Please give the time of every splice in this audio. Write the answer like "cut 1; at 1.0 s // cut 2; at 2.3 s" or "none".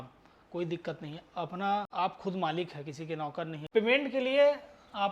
cut 1; at 1.9 s // cut 2; at 3.6 s